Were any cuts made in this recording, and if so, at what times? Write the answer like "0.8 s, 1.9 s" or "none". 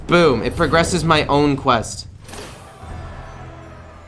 none